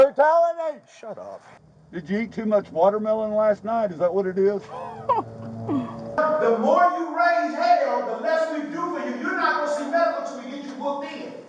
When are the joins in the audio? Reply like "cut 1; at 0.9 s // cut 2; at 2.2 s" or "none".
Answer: cut 1; at 1.9 s // cut 2; at 6.2 s